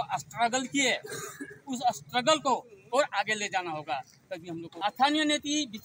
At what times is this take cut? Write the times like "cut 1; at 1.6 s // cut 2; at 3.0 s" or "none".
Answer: cut 1; at 4.7 s